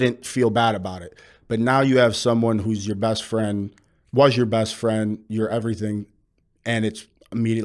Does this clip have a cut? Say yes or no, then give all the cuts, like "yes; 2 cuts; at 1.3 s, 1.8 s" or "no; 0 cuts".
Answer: no; 0 cuts